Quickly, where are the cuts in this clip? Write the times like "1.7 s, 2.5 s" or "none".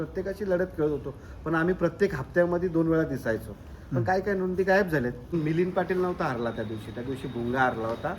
5.3 s